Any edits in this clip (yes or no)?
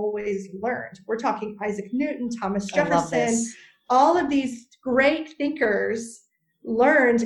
no